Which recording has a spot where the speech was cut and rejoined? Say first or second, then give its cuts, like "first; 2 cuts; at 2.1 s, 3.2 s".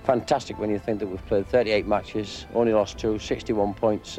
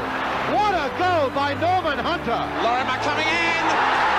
second; 1 cut; at 2.5 s